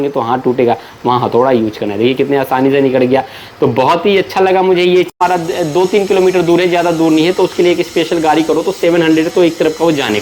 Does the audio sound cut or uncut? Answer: cut